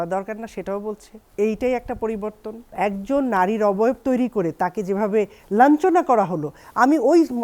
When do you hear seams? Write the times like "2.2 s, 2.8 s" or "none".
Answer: 2.7 s